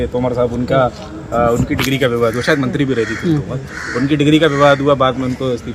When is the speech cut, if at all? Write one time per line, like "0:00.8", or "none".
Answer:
none